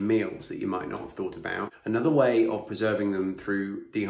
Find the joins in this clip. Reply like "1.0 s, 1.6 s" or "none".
1.7 s